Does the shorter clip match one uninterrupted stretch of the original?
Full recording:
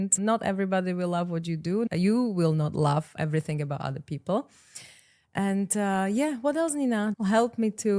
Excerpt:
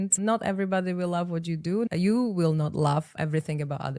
yes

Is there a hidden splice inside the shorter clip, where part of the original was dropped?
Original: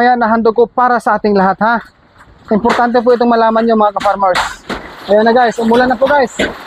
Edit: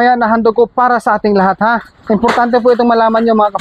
yes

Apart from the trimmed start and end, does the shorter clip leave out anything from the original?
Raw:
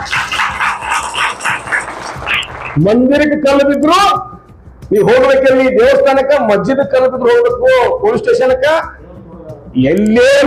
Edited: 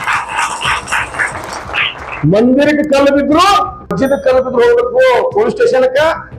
yes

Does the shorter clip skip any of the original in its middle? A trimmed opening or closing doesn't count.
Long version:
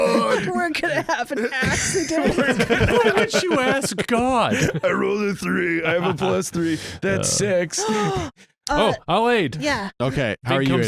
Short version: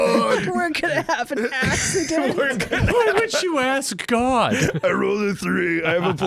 no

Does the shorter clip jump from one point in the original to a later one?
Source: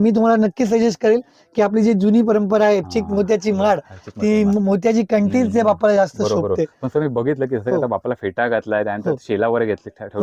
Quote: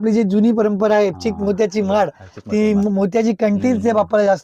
no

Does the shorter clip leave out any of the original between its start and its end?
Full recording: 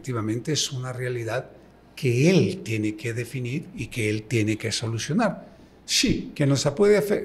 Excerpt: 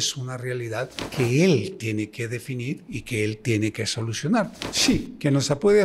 yes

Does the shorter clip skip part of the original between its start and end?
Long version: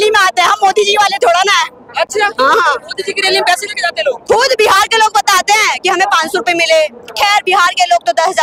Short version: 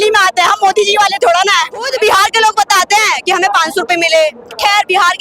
yes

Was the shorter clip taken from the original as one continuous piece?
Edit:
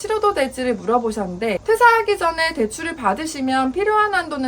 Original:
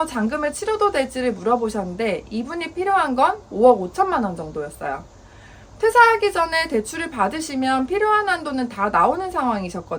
no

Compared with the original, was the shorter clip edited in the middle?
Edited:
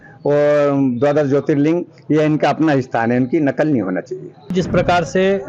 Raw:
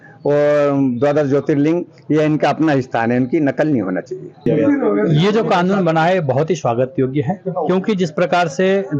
yes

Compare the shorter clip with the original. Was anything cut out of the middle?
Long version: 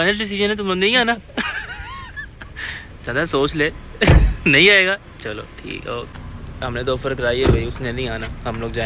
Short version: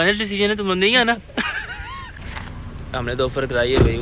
yes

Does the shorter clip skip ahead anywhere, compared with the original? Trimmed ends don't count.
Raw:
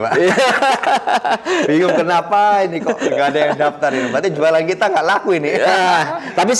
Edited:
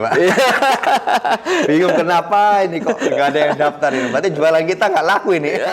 no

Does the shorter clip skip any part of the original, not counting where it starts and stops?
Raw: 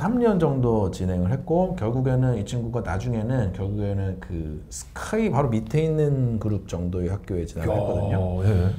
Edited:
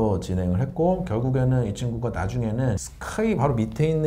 yes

